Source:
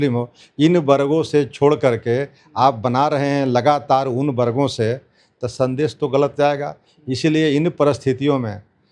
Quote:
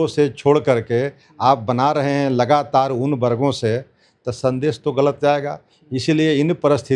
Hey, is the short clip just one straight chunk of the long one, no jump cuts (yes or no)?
yes